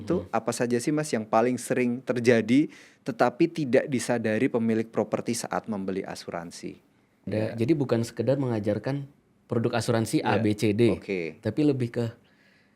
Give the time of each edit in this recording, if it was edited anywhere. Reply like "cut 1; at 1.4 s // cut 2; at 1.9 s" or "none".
cut 1; at 7.3 s